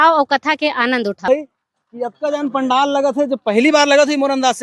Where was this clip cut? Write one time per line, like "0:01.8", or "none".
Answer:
0:01.3